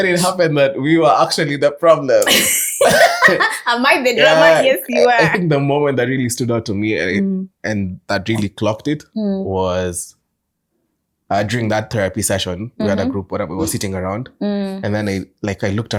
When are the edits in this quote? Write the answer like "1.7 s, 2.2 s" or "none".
none